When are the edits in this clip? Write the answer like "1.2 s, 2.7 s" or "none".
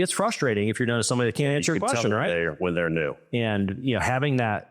3.2 s